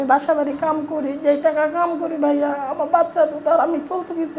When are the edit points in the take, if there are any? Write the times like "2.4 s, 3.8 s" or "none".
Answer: none